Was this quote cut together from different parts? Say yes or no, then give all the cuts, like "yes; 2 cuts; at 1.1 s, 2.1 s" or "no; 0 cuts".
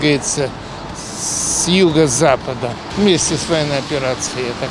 yes; 1 cut; at 2.8 s